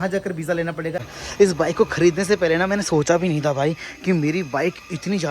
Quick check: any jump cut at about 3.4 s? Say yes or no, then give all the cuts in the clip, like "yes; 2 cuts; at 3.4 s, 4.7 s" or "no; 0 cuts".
no; 1 cut; at 1.1 s